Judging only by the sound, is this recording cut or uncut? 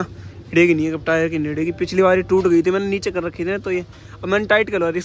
uncut